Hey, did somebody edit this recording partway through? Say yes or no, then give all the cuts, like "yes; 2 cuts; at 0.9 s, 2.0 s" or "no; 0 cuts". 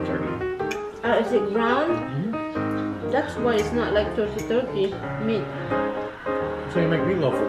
no; 0 cuts